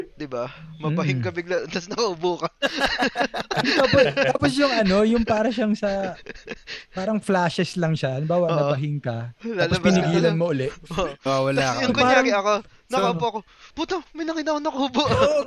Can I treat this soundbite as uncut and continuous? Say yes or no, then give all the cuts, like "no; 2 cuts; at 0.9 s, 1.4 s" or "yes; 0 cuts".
yes; 0 cuts